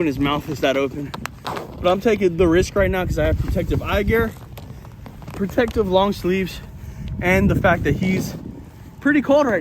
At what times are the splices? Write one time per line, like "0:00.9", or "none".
none